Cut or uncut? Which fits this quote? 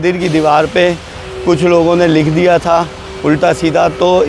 uncut